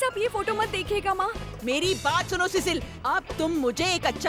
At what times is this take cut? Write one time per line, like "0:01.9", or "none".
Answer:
0:01.4

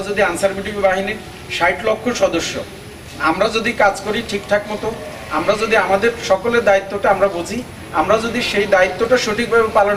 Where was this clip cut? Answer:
none

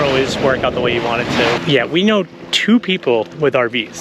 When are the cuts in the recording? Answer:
0:01.6

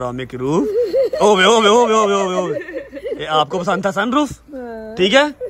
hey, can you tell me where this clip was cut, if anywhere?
none

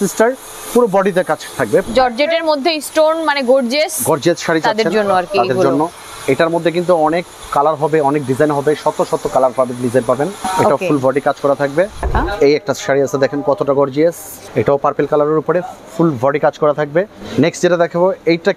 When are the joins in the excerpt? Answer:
0:01.9
0:10.4
0:12.1
0:14.3
0:17.2

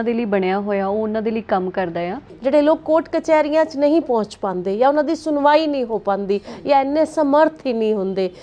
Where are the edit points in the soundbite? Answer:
0:02.3

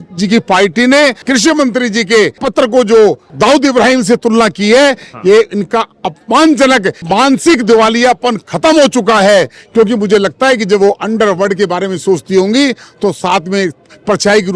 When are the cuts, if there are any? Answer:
0:01.2
0:02.4
0:03.3
0:07.0

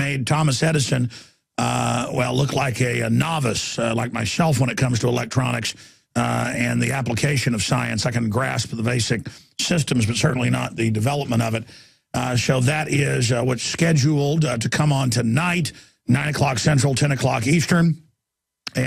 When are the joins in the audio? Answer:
0:10.2

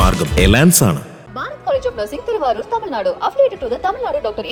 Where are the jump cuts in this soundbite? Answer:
none

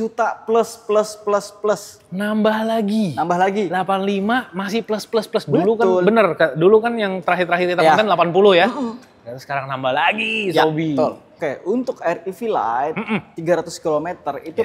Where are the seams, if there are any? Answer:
0:11.4

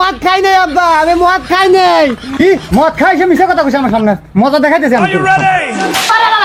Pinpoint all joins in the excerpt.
none

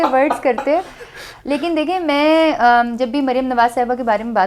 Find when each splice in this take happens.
none

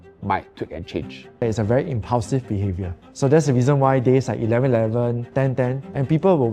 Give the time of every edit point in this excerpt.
0:01.4
0:05.2

